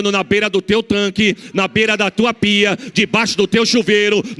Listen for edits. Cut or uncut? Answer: uncut